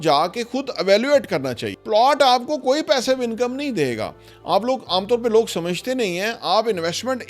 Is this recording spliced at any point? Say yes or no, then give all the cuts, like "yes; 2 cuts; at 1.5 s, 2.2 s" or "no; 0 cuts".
yes; 1 cut; at 1.7 s